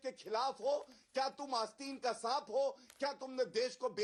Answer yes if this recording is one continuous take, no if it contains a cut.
yes